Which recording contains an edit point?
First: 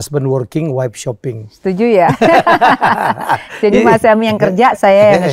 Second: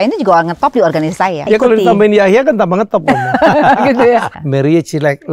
second; 2 cuts; at 1.5 s, 4.4 s

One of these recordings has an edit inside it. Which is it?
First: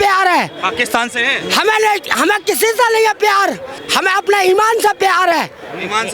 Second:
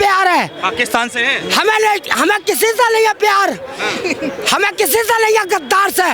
first; 1 cut; at 3.7 s

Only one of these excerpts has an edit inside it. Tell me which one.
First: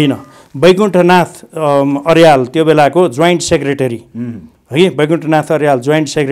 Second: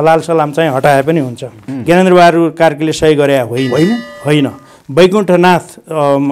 second; 1 cut; at 1.7 s

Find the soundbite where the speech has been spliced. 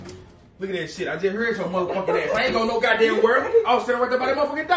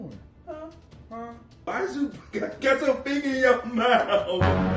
second; 1 cut; at 1.7 s

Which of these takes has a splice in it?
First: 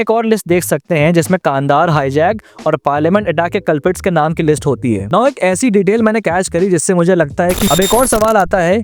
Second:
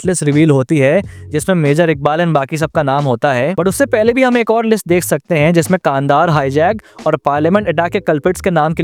first; 1 cut; at 7.7 s

